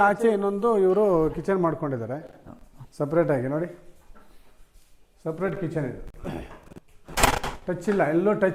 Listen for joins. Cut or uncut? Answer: uncut